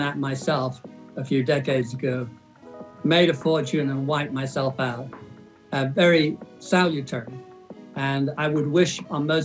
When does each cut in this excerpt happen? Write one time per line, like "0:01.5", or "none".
0:08.3